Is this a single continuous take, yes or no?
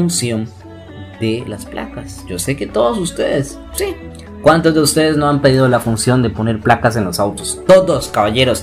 yes